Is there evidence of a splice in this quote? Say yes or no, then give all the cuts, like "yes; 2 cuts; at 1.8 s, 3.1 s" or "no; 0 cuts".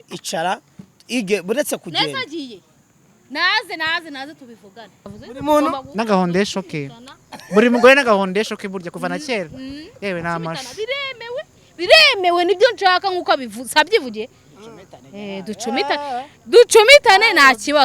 yes; 1 cut; at 5.1 s